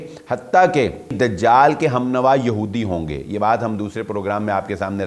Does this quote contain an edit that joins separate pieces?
yes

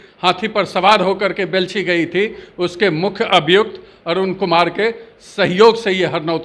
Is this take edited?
no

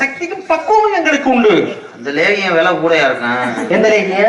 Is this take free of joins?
yes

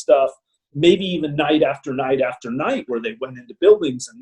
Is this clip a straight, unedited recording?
yes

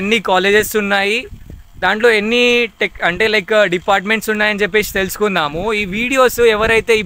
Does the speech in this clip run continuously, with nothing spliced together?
yes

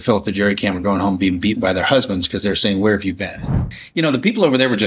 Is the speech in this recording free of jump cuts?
no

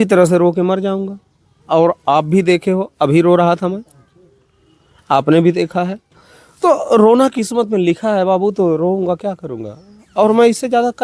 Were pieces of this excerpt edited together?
no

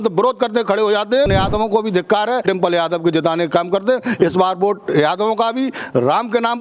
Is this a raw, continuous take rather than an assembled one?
no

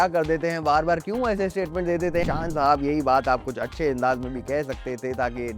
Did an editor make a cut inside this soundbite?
yes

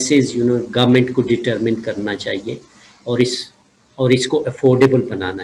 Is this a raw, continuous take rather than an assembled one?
yes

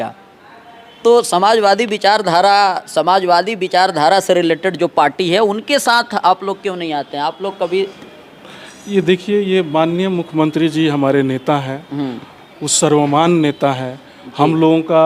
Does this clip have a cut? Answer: no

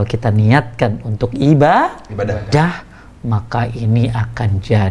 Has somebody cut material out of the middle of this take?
no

